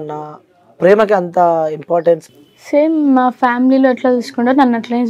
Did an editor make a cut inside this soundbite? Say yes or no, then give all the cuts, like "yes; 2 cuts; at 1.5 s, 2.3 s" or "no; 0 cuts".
yes; 1 cut; at 2.3 s